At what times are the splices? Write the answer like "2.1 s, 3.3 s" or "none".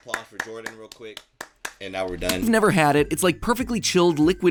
none

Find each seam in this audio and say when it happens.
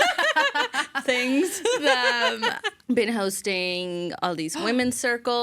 2.7 s

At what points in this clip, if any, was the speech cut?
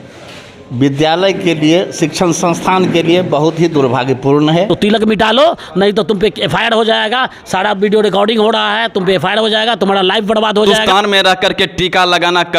4.7 s, 10.8 s

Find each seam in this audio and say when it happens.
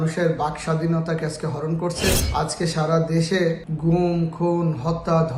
none

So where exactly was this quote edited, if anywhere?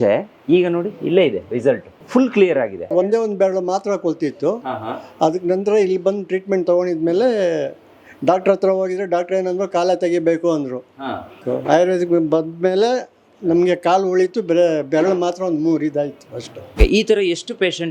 1.9 s, 2.9 s, 11.4 s, 16.8 s

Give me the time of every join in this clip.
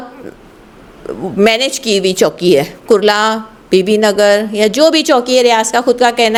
none

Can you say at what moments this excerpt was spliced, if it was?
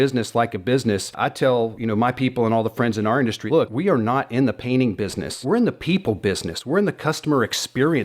1.5 s, 3.5 s, 5.3 s

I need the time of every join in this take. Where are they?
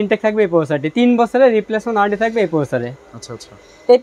none

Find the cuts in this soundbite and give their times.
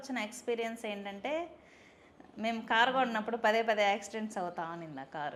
none

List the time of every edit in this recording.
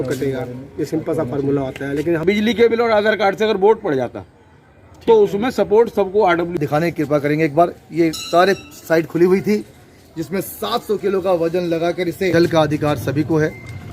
2.2 s, 6.5 s, 12.3 s

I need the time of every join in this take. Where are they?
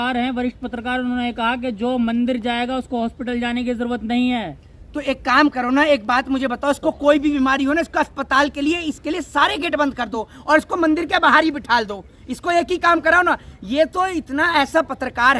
none

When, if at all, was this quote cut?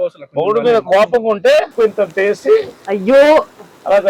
1.7 s

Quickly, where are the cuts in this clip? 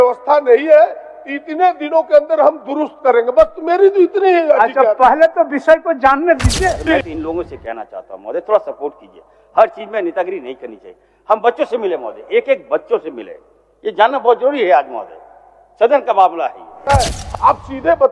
6.9 s, 17.2 s

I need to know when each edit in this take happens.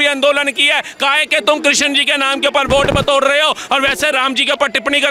none

